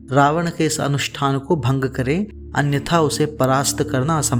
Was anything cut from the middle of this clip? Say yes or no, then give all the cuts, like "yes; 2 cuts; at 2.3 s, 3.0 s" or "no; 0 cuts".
no; 0 cuts